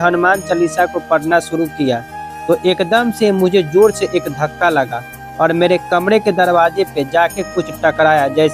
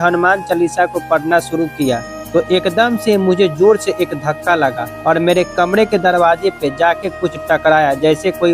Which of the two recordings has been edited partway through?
second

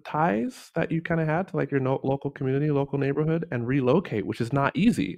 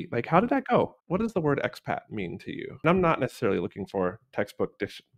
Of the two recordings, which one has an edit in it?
second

